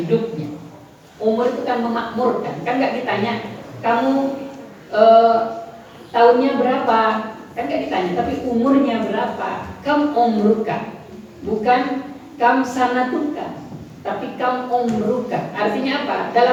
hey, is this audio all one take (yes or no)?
yes